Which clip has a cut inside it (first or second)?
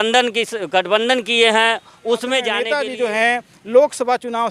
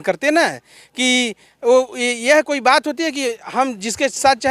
first